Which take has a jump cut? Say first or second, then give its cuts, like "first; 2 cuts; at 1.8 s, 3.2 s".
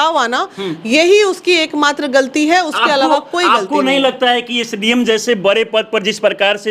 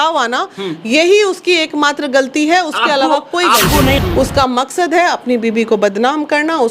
second; 1 cut; at 4.0 s